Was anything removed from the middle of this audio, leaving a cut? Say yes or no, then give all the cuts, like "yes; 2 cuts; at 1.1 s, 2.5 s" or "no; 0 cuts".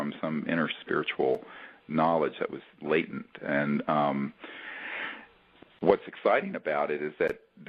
no; 0 cuts